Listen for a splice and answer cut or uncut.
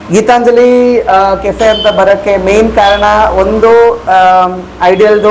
uncut